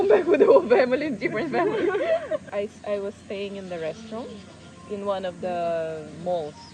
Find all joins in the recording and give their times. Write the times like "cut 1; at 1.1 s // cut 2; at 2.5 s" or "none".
cut 1; at 2.4 s